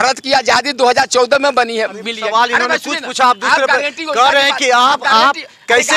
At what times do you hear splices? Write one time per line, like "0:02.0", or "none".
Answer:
none